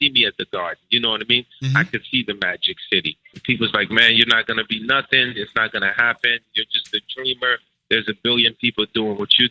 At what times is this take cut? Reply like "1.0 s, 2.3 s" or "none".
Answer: 3.4 s